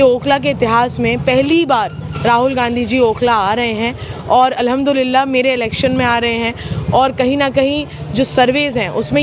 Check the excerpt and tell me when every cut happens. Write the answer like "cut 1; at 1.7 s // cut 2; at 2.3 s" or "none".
none